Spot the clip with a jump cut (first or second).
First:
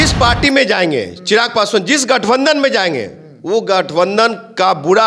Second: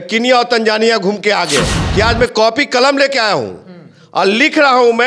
second